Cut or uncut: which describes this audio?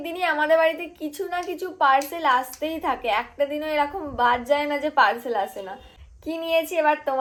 uncut